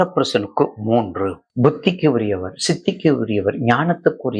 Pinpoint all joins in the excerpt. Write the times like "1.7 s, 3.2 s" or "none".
1.3 s